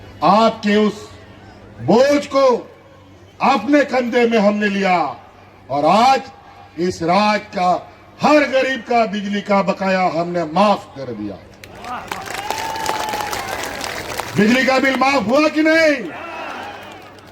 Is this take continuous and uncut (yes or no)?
yes